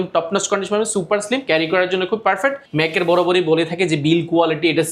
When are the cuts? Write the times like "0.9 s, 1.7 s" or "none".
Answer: 2.6 s